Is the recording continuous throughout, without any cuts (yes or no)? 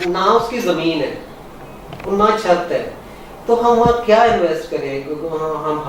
yes